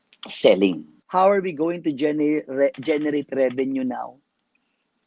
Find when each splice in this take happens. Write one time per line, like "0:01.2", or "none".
0:00.9

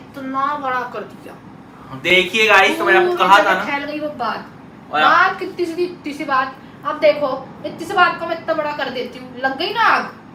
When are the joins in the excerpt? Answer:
none

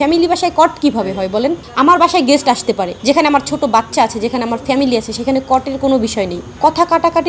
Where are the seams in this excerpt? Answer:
0:01.6
0:03.0
0:06.4

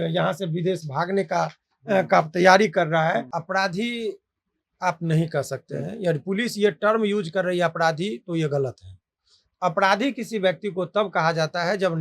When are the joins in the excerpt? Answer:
0:03.3

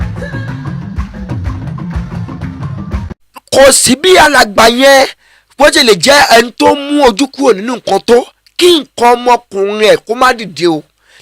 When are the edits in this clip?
0:03.3

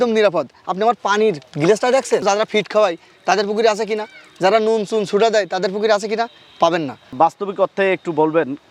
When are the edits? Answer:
none

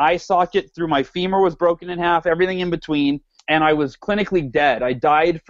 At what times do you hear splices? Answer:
0:03.3

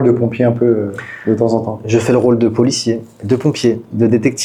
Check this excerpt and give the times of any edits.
none

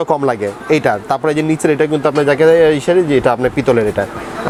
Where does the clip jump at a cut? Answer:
none

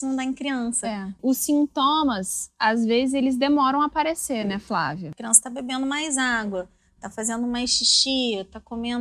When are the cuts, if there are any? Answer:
0:01.2
0:05.1

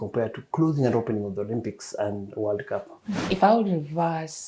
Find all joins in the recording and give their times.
0:03.2

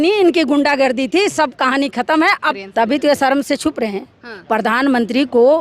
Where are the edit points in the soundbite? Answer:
0:02.5

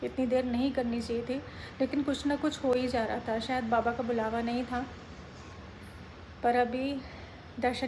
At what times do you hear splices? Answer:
none

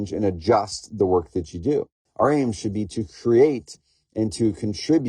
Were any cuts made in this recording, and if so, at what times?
0:02.0

